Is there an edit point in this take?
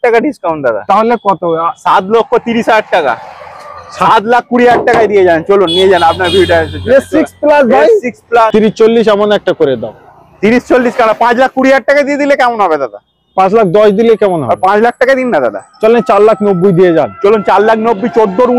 yes; 1 cut; at 8.5 s

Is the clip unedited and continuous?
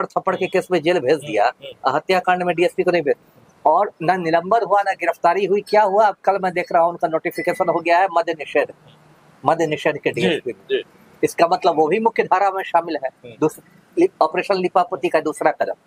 yes; 0 cuts

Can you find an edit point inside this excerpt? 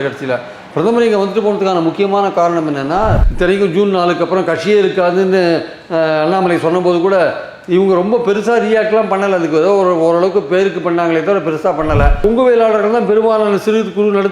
yes; 2 cuts; at 3.2 s, 12.2 s

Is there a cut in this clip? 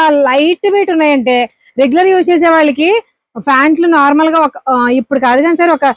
no; 0 cuts

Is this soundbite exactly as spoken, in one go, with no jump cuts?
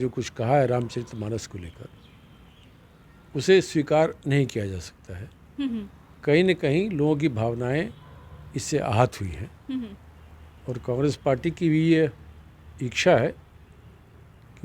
yes; 0 cuts

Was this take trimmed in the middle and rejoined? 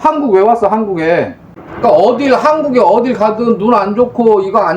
yes; 1 cut; at 1.4 s

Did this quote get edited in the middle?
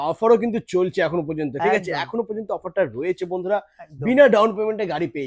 no; 0 cuts

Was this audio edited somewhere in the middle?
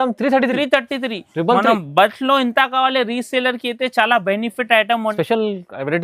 yes; 1 cut; at 5.1 s

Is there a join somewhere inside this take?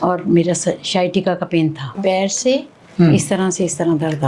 yes; 1 cut; at 2.0 s

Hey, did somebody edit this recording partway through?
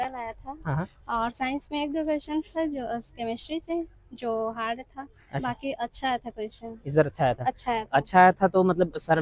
no; 0 cuts

